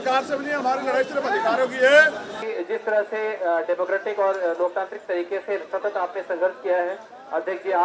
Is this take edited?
no; 0 cuts

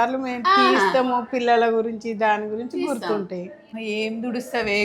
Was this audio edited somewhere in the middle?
yes; 1 cut; at 3.8 s

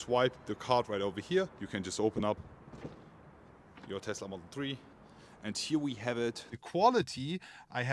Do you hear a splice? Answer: yes; 3 cuts; at 1.6 s, 4.9 s, 6.5 s

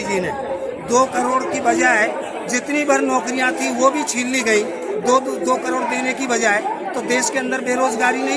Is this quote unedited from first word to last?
yes; 0 cuts

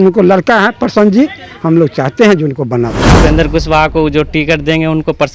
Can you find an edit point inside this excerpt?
yes; 1 cut; at 3.0 s

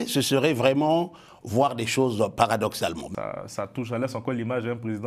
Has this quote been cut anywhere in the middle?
yes; 1 cut; at 3.1 s

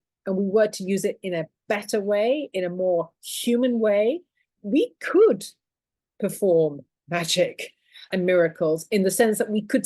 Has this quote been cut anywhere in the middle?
yes; 1 cut; at 4.5 s

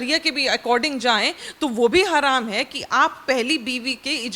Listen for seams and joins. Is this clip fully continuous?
yes; 0 cuts

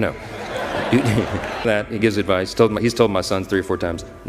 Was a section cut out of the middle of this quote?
yes; 1 cut; at 1.7 s

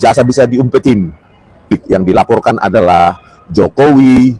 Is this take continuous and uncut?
no; 1 cut; at 1.7 s

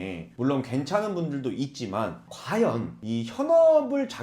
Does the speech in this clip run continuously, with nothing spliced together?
no; 1 cut; at 2.9 s

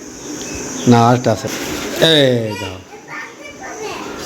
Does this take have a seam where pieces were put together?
yes; 1 cut; at 1.5 s

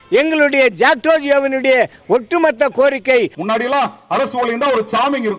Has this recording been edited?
yes; 1 cut; at 3.4 s

